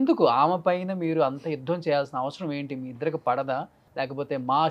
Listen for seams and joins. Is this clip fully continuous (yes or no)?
no